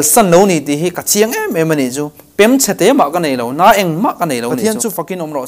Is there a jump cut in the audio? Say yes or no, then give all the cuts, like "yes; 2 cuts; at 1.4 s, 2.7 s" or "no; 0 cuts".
yes; 1 cut; at 4.6 s